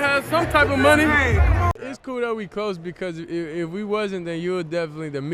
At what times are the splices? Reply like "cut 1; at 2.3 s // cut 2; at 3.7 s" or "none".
cut 1; at 1.6 s